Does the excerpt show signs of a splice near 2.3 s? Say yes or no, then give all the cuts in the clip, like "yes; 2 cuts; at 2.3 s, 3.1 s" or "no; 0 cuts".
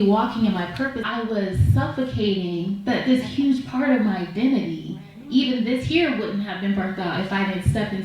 no; 1 cut; at 1.0 s